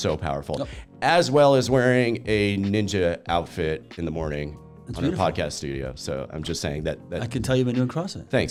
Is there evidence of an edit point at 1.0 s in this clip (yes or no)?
no